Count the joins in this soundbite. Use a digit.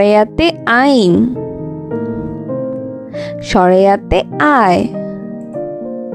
2